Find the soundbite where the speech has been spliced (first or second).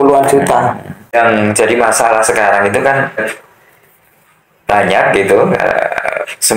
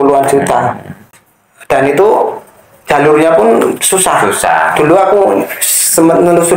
first